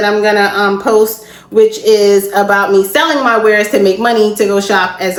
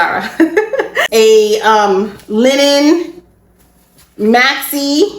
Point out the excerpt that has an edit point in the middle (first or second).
second